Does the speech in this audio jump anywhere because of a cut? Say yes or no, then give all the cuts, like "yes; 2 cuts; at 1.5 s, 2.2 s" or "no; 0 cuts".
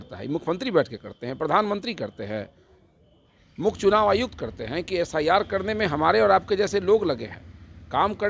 no; 0 cuts